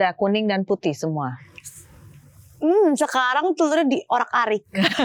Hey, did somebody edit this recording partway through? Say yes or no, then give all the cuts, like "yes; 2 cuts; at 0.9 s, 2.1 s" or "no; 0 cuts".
no; 0 cuts